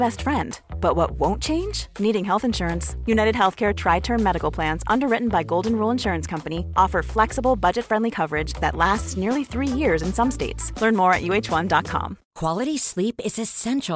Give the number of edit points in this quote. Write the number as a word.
one